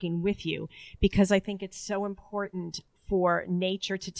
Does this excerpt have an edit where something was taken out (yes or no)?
yes